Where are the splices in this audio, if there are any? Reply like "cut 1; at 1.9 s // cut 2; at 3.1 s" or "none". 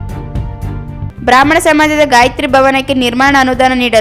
none